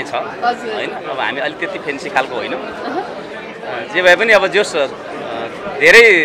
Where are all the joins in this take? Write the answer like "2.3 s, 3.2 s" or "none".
none